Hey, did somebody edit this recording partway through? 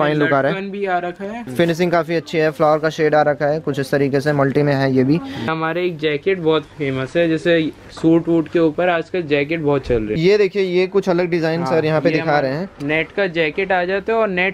yes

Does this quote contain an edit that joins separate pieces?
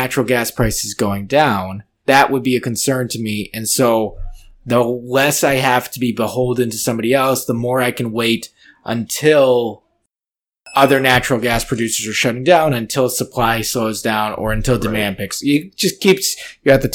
no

